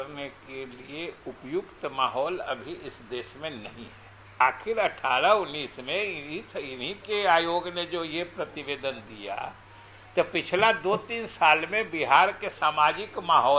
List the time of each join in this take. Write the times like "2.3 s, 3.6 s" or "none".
4.4 s